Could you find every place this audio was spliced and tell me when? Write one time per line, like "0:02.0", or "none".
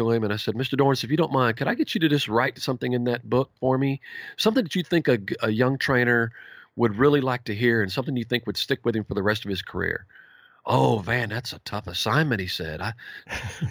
none